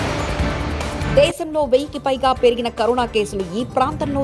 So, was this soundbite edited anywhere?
yes; 1 cut; at 1.0 s

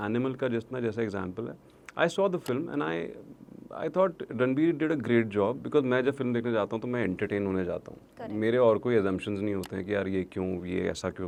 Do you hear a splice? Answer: no; 0 cuts

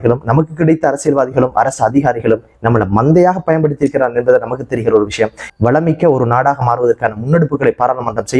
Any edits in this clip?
yes; 1 cut; at 5.5 s

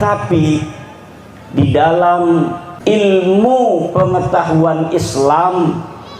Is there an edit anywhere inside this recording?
yes; 1 cut; at 2.7 s

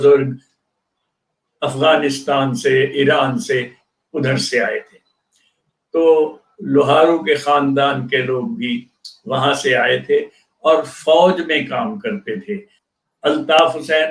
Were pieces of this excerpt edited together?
yes; 1 cut; at 12.7 s

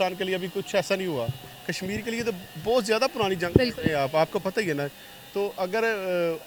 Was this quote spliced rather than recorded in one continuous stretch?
no; 0 cuts

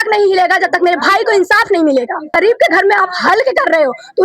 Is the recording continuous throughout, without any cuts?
no; 1 cut; at 2.3 s

